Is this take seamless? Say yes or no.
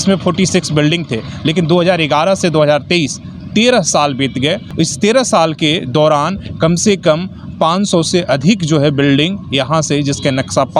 no